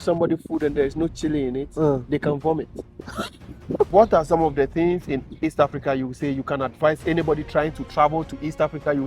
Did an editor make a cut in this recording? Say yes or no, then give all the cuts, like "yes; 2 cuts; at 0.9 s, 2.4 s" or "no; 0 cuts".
yes; 1 cut; at 3.9 s